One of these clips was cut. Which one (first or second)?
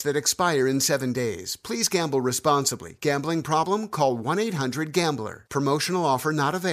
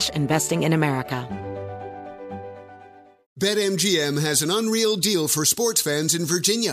second